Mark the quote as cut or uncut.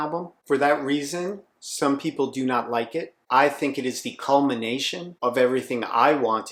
uncut